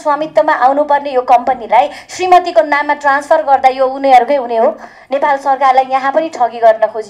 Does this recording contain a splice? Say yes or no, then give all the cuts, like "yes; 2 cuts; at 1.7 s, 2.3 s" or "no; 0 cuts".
no; 0 cuts